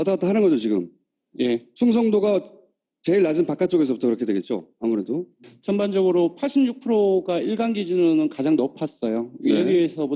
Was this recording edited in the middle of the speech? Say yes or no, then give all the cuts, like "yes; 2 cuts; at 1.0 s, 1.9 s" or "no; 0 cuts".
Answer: yes; 1 cut; at 8.2 s